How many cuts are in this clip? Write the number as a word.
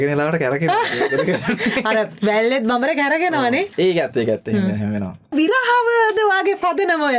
one